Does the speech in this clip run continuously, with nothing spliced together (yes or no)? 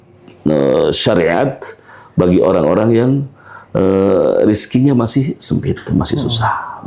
yes